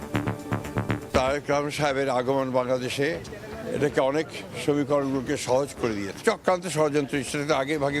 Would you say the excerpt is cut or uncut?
cut